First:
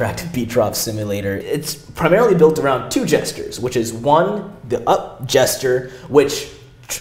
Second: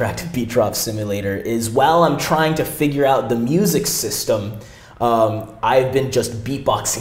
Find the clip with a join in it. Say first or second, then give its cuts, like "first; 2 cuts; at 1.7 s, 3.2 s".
first; 1 cut; at 1.4 s